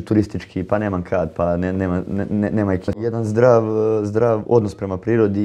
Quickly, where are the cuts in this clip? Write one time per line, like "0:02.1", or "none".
0:03.0